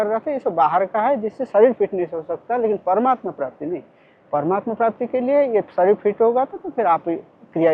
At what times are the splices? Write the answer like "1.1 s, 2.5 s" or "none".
none